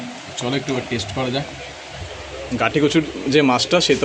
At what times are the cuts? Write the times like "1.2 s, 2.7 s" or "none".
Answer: 2.0 s